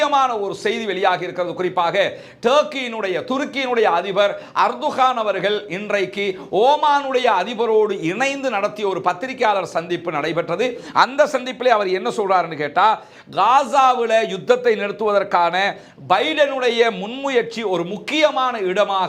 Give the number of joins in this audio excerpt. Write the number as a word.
zero